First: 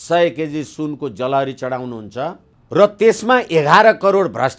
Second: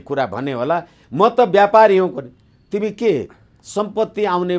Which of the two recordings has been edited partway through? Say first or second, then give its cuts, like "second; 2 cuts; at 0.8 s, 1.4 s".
first; 1 cut; at 2.5 s